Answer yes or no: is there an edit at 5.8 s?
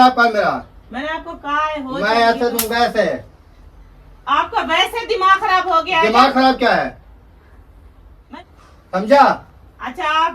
no